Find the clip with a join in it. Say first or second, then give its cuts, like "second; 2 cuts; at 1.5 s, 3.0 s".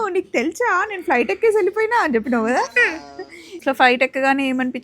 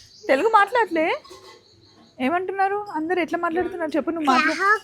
first; 1 cut; at 3.5 s